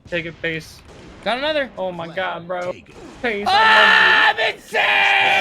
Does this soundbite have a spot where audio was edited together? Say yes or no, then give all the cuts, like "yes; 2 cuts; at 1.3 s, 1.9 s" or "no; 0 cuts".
yes; 1 cut; at 3.4 s